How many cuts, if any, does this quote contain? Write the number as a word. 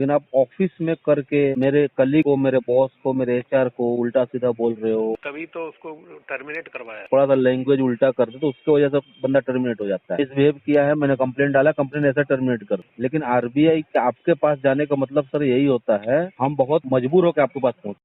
six